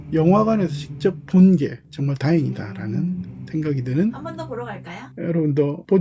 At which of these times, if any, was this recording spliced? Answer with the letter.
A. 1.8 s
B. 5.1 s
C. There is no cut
B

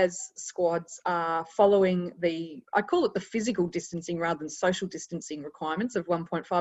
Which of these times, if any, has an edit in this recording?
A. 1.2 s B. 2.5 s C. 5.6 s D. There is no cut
B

